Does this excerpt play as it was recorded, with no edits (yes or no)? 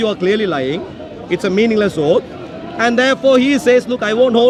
yes